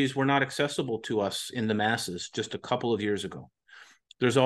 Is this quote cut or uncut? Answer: uncut